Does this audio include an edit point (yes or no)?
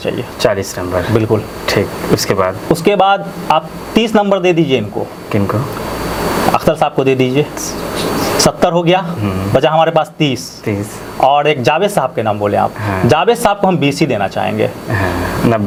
no